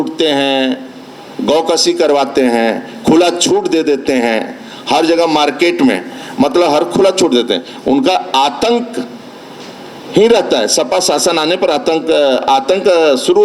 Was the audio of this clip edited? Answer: no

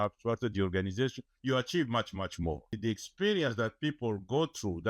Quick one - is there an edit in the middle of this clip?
yes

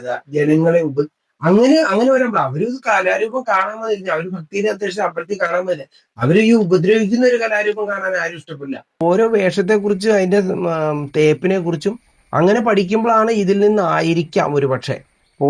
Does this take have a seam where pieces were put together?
yes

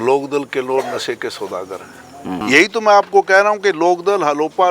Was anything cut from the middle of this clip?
yes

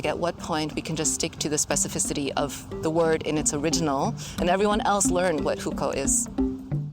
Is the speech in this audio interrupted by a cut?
yes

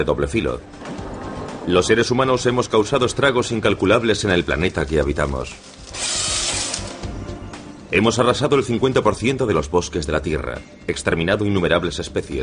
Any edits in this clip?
no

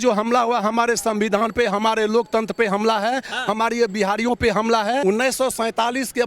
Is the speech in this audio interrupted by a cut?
yes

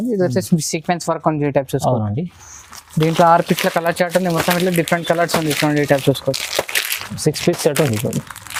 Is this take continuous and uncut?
yes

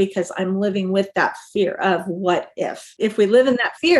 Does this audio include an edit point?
yes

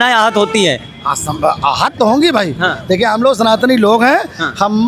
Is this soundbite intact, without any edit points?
yes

